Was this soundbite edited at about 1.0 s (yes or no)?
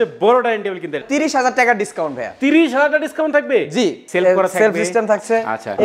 yes